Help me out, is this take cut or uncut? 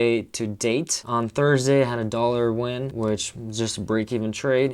cut